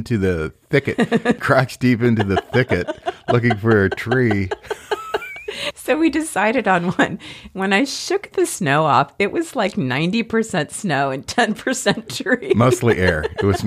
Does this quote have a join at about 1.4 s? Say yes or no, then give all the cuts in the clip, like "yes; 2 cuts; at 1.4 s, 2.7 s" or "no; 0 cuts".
yes; 1 cut; at 1.4 s